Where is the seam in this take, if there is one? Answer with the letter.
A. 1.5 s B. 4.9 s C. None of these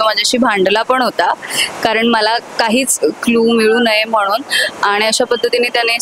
C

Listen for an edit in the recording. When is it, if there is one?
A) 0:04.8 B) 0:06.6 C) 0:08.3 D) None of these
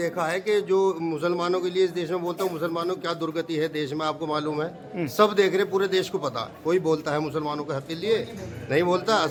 D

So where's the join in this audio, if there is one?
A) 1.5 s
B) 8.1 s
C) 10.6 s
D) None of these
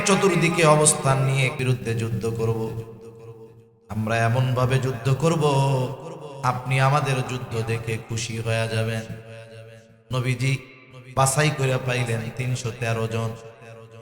A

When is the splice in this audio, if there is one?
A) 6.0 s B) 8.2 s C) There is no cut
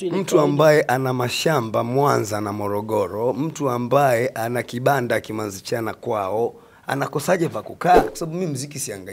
B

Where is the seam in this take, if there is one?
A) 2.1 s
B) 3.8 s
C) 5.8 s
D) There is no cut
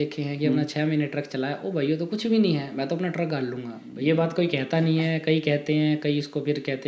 B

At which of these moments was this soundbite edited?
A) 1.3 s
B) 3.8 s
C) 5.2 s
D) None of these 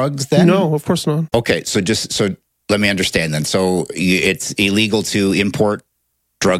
A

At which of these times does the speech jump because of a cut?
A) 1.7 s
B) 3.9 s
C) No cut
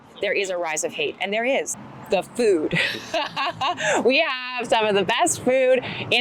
A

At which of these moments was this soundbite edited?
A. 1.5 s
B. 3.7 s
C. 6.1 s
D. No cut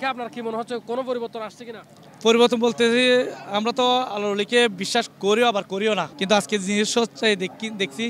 C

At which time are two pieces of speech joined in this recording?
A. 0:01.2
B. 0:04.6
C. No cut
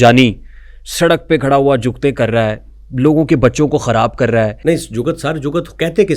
B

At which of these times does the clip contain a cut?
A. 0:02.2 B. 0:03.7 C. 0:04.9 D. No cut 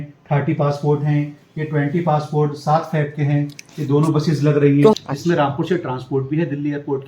C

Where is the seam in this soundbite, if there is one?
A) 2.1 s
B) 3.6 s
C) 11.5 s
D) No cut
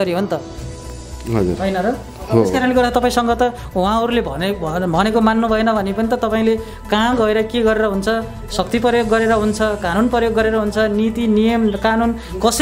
D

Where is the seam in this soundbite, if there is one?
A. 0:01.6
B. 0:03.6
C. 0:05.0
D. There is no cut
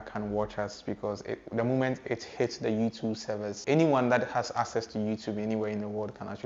B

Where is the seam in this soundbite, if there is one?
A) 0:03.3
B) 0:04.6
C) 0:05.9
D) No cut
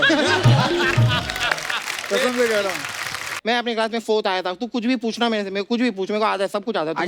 A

